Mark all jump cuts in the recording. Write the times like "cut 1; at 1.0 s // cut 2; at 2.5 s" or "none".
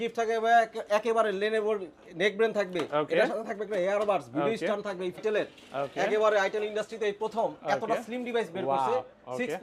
cut 1; at 5.2 s